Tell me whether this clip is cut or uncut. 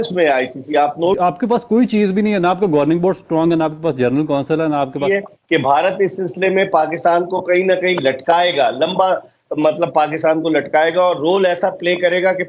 cut